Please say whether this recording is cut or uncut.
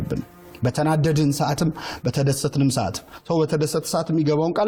uncut